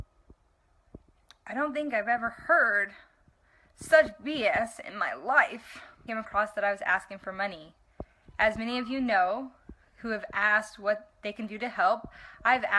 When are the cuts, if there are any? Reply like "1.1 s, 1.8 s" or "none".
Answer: none